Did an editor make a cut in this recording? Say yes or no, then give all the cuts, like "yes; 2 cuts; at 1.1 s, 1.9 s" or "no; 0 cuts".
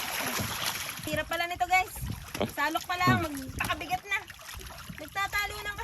yes; 2 cuts; at 1.1 s, 4.6 s